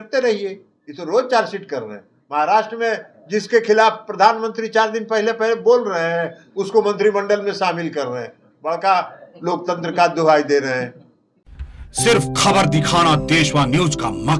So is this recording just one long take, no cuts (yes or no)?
yes